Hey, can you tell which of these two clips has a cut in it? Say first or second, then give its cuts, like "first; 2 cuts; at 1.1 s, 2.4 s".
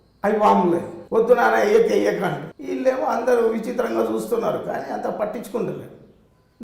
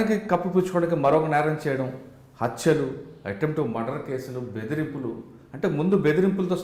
first; 2 cuts; at 0.9 s, 2.5 s